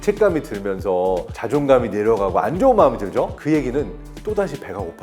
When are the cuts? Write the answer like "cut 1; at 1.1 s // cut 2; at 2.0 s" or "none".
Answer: cut 1; at 1.3 s // cut 2; at 3.4 s // cut 3; at 4.1 s